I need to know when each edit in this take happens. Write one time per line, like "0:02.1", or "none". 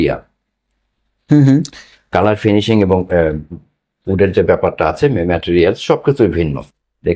none